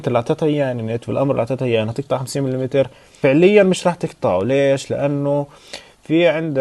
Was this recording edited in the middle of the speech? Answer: yes; 1 cut; at 3.0 s

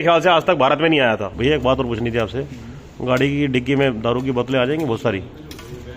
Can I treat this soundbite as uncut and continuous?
no; 1 cut; at 1.3 s

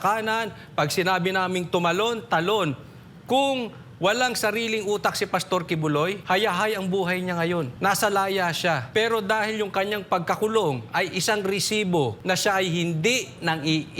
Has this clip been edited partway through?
yes; 4 cuts; at 6.2 s, 7.7 s, 8.8 s, 12.2 s

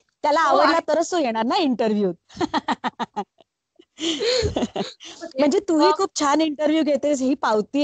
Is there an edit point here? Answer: no; 0 cuts

